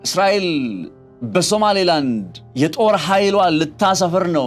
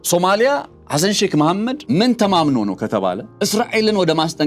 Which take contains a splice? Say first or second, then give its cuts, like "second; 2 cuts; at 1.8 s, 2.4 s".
second; 2 cuts; at 1.8 s, 3.3 s